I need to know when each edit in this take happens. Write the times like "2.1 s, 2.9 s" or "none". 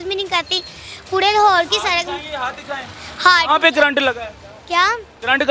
none